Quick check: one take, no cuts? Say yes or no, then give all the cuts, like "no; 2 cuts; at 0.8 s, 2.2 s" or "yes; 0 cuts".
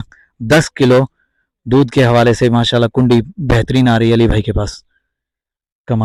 yes; 0 cuts